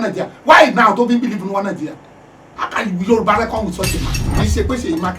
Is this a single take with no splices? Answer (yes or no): no